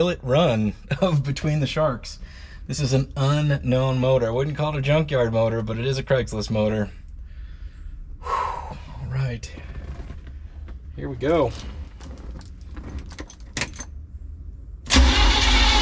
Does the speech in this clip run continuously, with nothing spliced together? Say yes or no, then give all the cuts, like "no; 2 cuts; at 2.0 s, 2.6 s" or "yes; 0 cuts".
yes; 0 cuts